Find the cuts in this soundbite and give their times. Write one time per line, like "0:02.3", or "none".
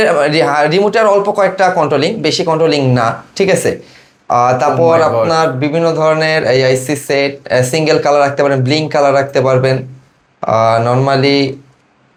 none